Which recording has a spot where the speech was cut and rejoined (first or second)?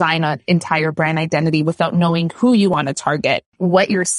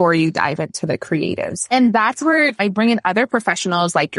second